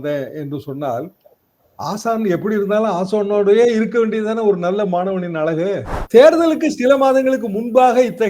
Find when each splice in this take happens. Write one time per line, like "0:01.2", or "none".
0:05.9